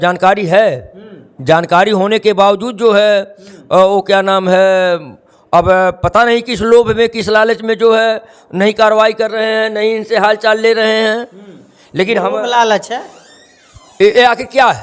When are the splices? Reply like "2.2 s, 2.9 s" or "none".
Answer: none